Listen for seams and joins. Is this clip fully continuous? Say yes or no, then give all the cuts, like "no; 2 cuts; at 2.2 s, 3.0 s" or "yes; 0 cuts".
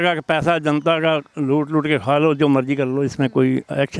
yes; 0 cuts